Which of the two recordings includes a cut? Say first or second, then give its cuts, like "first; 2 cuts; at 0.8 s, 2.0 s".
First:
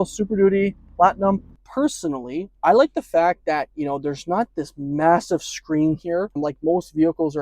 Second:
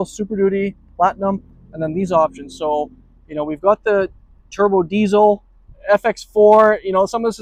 first; 2 cuts; at 1.6 s, 6.4 s